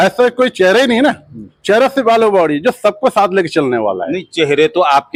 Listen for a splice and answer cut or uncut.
uncut